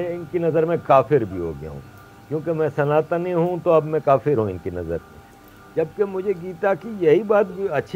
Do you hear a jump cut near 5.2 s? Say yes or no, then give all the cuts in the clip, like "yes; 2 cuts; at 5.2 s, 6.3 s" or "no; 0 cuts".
no; 0 cuts